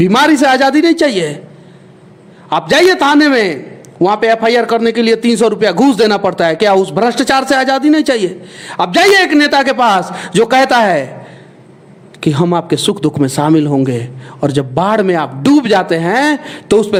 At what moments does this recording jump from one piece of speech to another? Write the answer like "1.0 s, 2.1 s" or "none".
none